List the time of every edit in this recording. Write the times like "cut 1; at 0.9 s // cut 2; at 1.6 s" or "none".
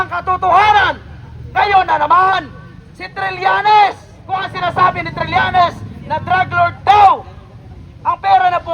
cut 1; at 4.1 s